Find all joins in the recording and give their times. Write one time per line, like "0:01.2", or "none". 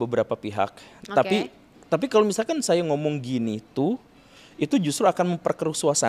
none